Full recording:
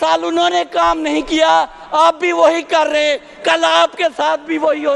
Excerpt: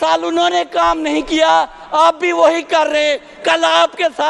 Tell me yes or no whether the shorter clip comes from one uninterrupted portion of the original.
yes